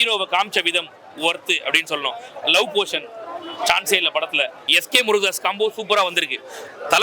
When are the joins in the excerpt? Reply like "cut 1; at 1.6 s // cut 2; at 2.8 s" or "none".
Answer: cut 1; at 4.6 s